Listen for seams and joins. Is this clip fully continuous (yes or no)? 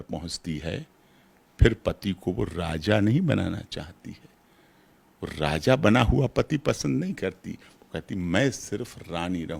yes